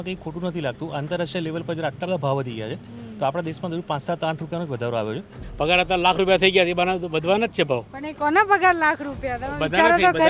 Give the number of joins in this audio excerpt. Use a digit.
1